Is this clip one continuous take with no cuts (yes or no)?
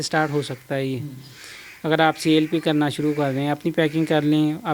yes